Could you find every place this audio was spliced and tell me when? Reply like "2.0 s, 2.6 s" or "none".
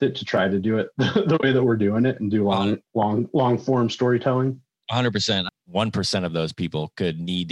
5.5 s